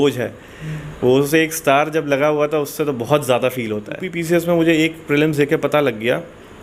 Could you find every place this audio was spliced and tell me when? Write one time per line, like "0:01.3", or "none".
0:04.1